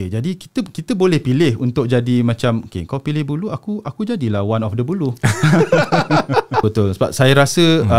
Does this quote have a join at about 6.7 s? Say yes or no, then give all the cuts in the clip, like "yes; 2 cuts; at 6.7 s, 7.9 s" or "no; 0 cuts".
yes; 1 cut; at 6.7 s